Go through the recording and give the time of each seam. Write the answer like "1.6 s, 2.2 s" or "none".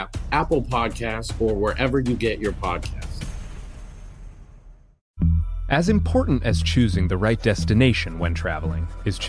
5.0 s

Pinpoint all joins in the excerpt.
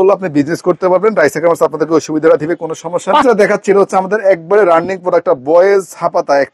3.2 s

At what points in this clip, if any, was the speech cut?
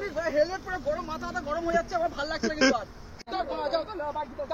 3.1 s

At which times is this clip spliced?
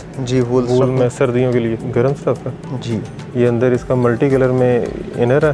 1.8 s

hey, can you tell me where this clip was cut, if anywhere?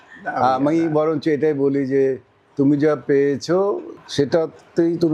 4.0 s

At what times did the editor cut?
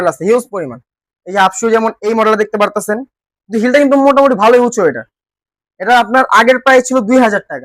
none

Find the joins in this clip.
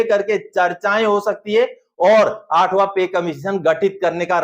none

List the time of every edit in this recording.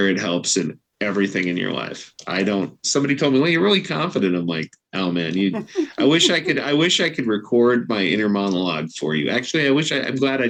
none

